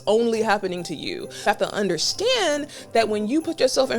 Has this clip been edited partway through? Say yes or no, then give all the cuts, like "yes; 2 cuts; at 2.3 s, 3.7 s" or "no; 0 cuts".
yes; 1 cut; at 1.4 s